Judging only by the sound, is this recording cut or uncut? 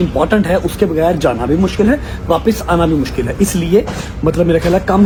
uncut